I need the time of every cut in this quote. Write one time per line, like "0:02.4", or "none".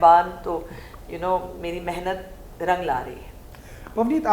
none